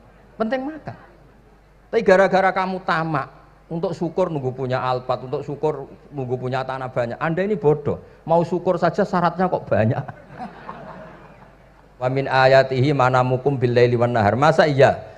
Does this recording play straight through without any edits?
no; 1 cut; at 12.1 s

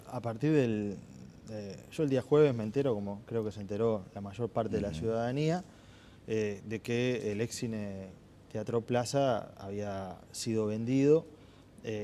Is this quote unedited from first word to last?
yes; 0 cuts

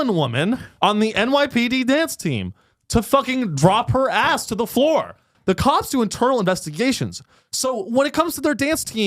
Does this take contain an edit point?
yes; 1 cut; at 5.3 s

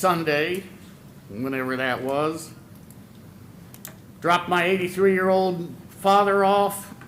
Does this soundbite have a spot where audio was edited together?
no; 0 cuts

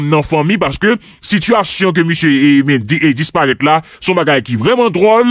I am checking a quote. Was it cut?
no; 0 cuts

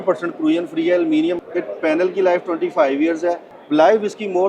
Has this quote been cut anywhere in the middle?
yes; 2 cuts; at 1.4 s, 3.5 s

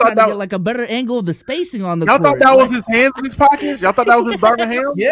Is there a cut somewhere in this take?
no; 0 cuts

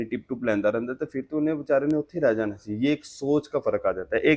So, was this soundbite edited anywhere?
no; 0 cuts

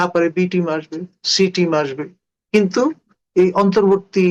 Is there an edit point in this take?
no; 0 cuts

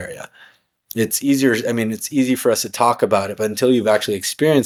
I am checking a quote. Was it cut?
no; 0 cuts

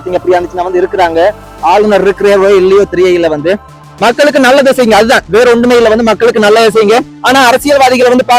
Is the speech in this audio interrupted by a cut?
no; 0 cuts

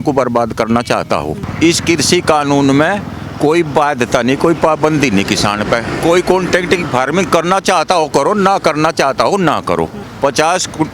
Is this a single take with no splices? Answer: no; 2 cuts; at 1.4 s, 10.0 s

